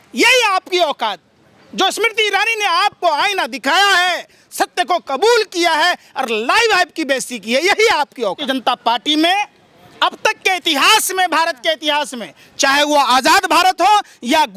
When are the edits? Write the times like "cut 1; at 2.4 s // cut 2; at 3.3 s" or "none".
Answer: cut 1; at 8.4 s